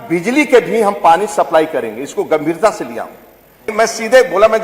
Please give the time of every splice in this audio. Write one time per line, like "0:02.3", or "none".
0:03.7